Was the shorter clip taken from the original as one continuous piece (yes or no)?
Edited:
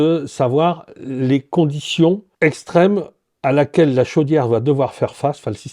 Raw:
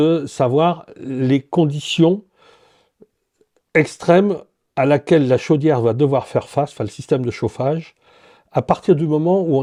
no